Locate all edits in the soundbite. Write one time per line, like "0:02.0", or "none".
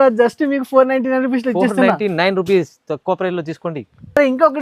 none